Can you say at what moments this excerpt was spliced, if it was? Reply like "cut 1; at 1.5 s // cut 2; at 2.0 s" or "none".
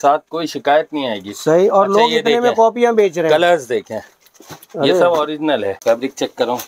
cut 1; at 5.8 s